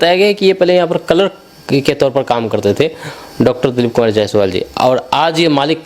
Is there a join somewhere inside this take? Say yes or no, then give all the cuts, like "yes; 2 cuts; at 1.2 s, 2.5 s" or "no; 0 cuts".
no; 0 cuts